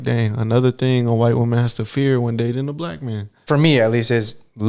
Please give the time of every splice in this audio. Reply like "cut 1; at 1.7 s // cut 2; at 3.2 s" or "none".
cut 1; at 3.3 s